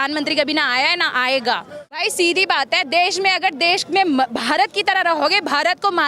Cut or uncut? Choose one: cut